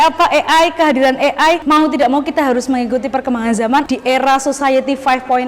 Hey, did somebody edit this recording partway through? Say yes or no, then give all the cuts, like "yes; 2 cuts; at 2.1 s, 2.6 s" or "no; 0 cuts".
yes; 2 cuts; at 1.6 s, 3.9 s